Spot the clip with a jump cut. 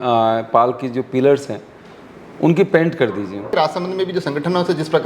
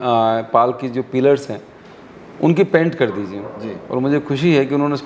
first; 1 cut; at 3.5 s

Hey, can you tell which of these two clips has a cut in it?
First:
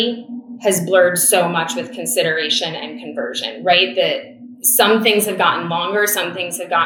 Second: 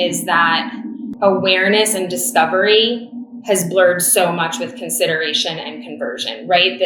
second; 1 cut; at 1.0 s

